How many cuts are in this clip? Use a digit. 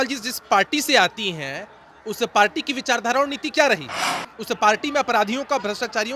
0